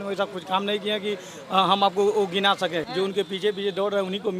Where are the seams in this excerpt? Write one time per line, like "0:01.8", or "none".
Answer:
0:02.9